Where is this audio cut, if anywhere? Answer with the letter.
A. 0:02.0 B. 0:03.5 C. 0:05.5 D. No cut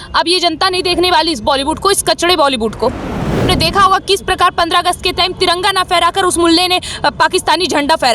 B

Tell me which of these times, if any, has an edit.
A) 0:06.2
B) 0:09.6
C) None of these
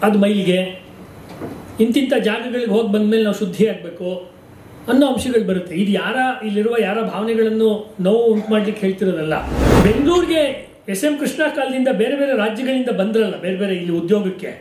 B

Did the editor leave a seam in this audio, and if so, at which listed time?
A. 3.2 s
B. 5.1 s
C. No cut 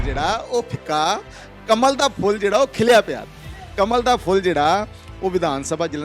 C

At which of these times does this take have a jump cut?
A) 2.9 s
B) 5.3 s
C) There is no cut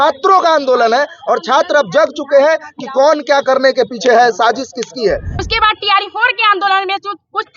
B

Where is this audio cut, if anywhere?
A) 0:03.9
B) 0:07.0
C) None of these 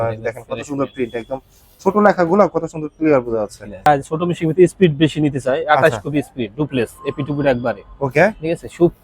A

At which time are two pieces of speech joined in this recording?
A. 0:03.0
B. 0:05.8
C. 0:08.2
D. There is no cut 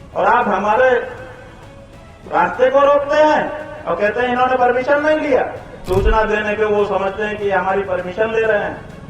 B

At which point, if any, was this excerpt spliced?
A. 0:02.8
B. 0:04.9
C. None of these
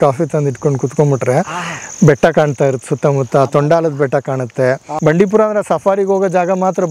B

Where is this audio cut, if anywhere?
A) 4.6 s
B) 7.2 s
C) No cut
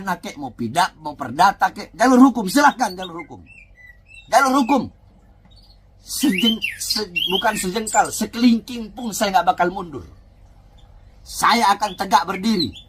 C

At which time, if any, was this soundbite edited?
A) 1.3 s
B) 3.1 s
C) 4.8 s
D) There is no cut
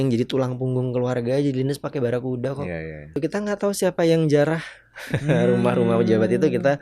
B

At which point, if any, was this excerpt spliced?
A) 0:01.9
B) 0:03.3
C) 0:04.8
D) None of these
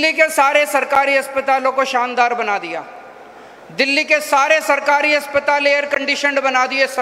D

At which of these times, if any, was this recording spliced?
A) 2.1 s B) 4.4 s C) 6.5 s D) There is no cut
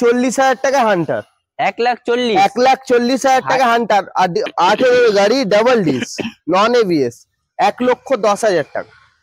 B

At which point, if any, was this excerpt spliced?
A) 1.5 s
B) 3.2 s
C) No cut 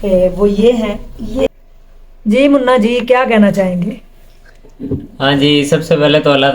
A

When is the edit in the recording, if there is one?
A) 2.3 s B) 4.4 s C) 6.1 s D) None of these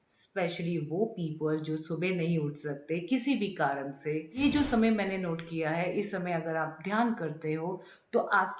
B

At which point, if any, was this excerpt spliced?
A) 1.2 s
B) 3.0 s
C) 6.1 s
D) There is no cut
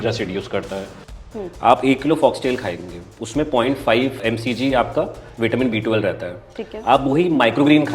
A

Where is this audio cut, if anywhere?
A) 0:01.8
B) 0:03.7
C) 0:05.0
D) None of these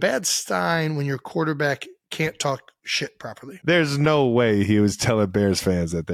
B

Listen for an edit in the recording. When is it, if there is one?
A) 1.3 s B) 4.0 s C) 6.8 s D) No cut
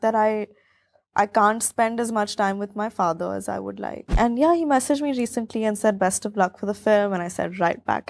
B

